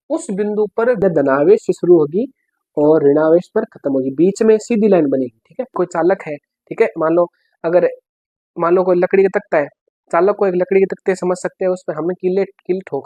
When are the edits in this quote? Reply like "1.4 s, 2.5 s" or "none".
1.0 s, 5.7 s